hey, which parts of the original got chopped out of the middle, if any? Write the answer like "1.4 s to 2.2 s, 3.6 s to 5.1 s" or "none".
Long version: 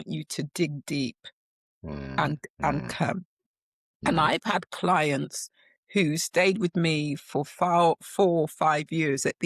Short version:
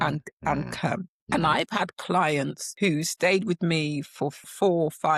3.3 s to 3.9 s, 5.4 s to 5.8 s, 7.5 s to 8.0 s